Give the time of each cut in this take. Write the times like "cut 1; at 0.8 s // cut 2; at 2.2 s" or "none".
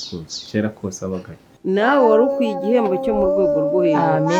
cut 1; at 1.5 s